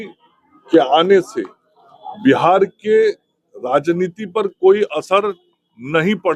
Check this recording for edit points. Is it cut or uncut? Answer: uncut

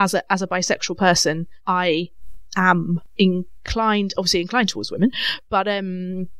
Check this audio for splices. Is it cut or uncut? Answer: cut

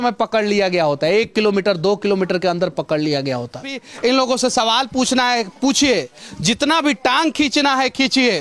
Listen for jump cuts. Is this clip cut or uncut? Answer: cut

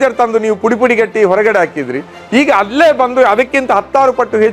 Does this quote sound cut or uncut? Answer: uncut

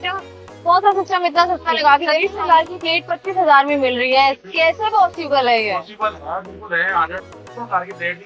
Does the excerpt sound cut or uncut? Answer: cut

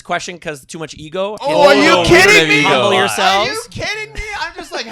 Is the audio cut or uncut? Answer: cut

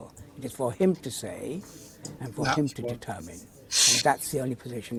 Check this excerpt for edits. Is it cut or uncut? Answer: uncut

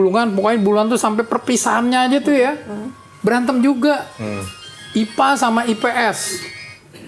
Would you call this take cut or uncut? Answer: uncut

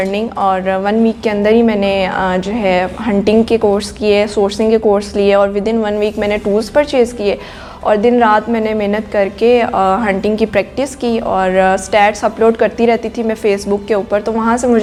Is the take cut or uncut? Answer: uncut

